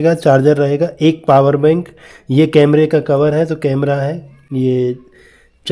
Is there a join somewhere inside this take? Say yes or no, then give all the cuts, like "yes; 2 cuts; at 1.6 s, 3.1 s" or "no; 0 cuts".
no; 0 cuts